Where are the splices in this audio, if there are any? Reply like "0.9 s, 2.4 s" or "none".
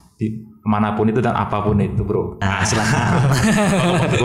2.4 s